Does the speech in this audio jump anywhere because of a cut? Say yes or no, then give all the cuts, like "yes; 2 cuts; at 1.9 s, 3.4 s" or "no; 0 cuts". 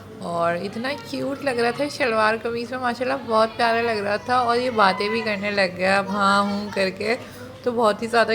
no; 0 cuts